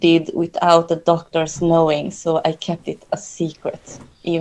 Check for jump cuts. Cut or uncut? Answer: uncut